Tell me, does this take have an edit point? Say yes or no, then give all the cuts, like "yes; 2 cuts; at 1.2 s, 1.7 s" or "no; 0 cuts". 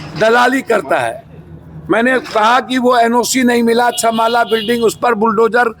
no; 0 cuts